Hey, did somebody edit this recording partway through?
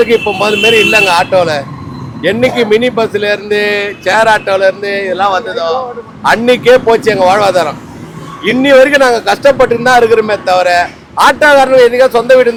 no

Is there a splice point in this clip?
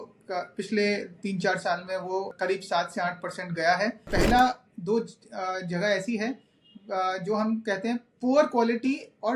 yes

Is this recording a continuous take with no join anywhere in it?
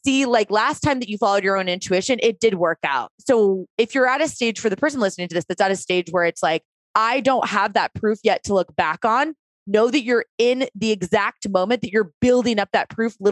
no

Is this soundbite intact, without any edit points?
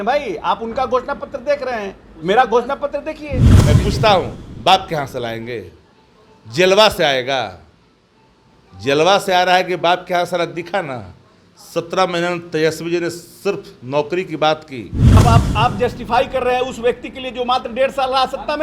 no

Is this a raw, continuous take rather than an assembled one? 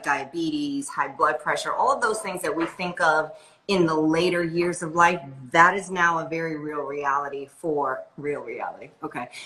yes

